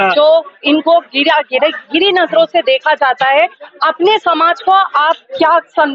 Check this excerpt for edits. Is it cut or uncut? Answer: uncut